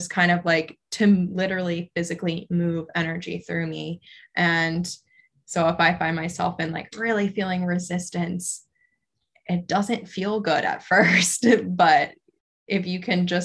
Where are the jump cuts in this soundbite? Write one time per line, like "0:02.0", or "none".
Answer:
none